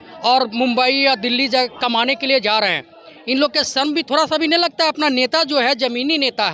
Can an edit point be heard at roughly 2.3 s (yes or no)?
no